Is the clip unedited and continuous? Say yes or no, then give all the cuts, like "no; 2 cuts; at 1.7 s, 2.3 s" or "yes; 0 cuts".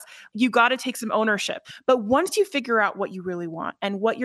no; 1 cut; at 1.5 s